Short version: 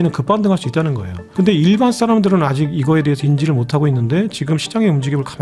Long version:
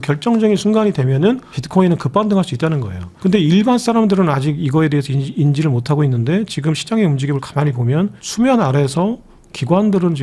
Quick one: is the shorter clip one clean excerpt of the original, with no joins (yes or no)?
no